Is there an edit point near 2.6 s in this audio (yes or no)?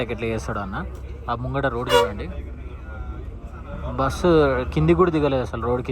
no